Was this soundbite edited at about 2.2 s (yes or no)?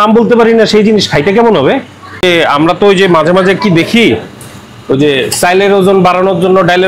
yes